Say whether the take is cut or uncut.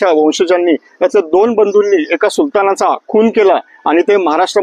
uncut